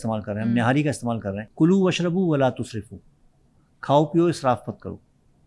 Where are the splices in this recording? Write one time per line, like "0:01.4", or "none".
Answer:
0:01.4